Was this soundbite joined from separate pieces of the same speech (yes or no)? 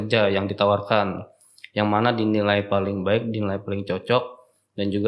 no